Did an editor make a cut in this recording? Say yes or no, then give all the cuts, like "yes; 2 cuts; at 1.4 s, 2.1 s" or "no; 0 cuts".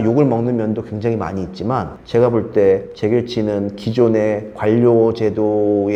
no; 0 cuts